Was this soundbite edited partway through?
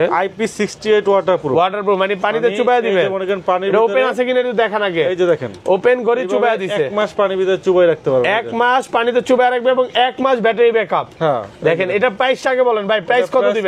no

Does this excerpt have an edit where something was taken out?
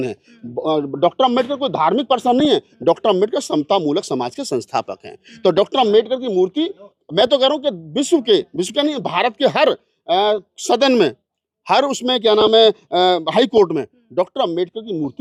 no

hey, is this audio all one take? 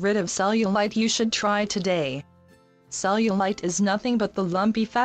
yes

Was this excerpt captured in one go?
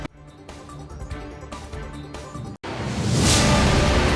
no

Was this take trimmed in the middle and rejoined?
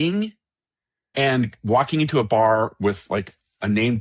no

